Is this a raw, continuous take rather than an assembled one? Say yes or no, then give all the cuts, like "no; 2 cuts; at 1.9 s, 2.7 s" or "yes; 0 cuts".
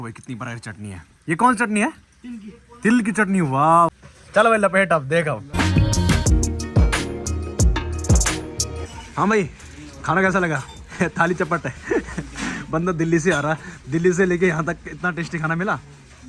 yes; 0 cuts